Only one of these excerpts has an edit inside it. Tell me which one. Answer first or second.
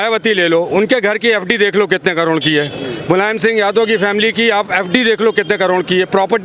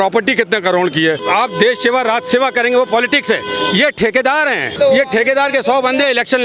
second